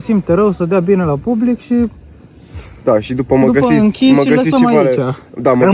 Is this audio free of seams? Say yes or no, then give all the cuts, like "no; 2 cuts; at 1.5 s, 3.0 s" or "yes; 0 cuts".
yes; 0 cuts